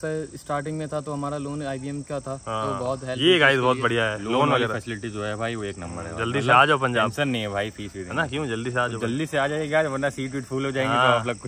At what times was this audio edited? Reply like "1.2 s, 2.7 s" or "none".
none